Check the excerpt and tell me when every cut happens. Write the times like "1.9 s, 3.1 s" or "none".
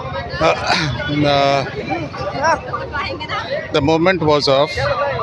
none